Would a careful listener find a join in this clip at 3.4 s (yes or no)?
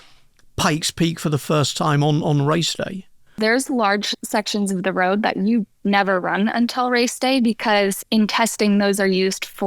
yes